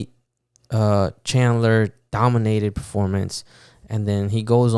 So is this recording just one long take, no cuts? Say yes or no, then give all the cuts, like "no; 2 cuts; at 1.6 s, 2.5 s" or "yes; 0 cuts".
yes; 0 cuts